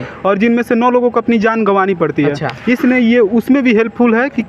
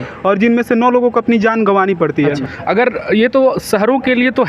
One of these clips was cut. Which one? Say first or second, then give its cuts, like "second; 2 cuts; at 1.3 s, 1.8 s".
second; 1 cut; at 2.5 s